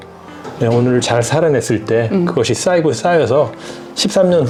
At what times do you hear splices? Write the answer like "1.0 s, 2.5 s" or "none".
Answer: none